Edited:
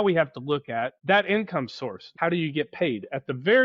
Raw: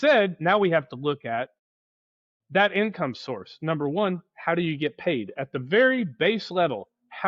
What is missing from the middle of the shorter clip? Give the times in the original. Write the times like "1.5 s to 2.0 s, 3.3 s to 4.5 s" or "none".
1.5 s to 2.4 s, 3.5 s to 4.3 s